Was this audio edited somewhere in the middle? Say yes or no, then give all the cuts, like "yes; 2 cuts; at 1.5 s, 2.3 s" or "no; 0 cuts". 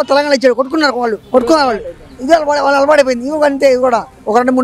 yes; 1 cut; at 1.2 s